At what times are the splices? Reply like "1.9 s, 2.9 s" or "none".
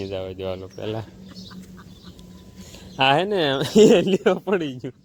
none